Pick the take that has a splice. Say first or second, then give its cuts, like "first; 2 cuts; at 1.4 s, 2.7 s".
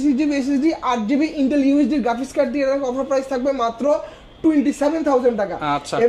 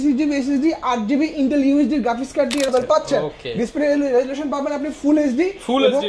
second; 1 cut; at 2.7 s